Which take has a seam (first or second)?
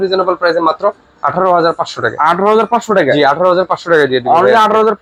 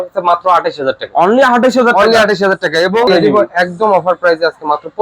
second